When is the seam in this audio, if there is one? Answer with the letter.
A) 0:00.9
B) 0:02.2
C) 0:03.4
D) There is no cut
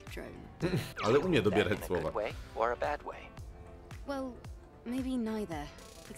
A